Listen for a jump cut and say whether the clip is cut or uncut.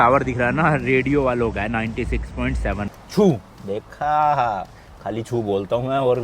cut